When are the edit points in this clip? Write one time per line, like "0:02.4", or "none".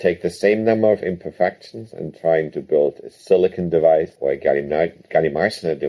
0:04.1